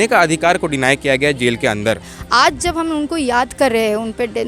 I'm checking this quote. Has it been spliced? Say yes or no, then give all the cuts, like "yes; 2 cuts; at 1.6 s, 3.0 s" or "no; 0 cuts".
yes; 1 cut; at 2.2 s